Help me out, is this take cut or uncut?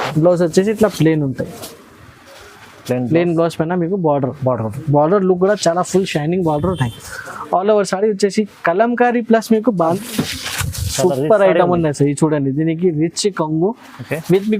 cut